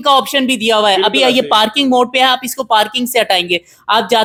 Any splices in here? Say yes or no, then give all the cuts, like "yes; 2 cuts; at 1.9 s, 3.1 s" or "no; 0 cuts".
no; 0 cuts